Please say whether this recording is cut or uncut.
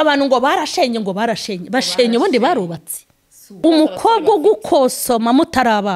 cut